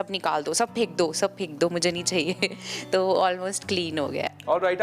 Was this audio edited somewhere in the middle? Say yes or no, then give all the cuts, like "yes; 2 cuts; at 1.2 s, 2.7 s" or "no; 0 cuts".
no; 0 cuts